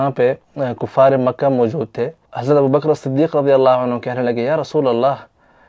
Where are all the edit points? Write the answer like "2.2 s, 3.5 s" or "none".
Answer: 2.3 s